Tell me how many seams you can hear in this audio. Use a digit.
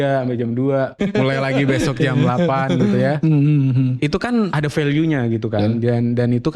2